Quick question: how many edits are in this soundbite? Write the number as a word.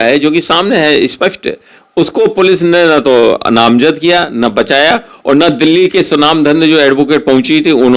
zero